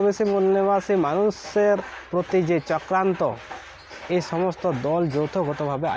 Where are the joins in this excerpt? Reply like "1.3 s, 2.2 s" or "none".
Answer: none